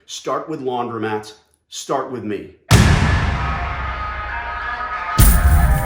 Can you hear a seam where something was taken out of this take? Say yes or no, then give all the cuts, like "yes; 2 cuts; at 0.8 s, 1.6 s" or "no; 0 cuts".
yes; 1 cut; at 2.5 s